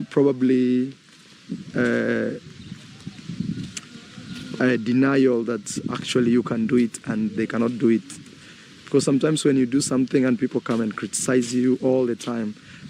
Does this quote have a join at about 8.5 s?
yes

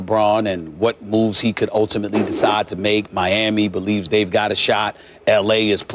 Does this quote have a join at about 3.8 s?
yes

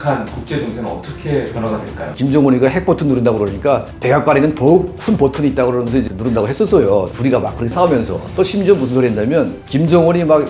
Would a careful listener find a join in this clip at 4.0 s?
no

